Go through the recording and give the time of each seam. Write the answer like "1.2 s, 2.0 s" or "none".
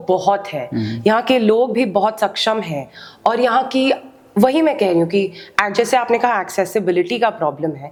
none